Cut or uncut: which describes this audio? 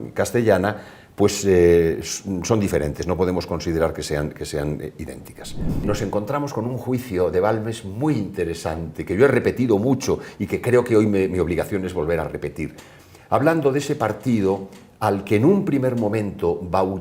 cut